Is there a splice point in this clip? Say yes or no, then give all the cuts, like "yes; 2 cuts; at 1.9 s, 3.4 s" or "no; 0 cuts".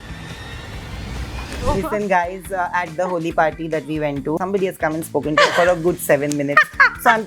yes; 2 cuts; at 1.6 s, 4.4 s